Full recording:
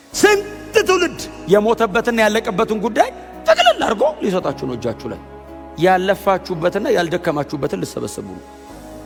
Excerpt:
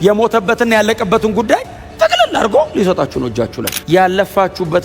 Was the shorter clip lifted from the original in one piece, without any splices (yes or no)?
no